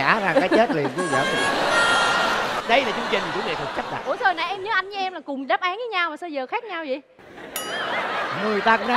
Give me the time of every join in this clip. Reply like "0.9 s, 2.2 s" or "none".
2.6 s